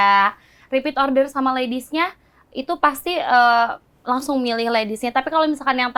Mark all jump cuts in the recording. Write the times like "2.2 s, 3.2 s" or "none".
none

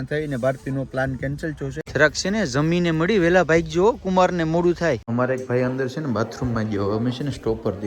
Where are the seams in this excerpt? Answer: 1.8 s, 5.1 s

